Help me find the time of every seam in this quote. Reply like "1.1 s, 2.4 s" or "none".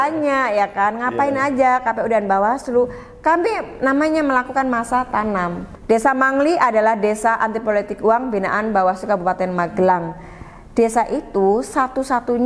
5.7 s